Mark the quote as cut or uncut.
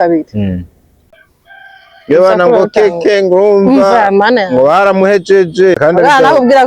cut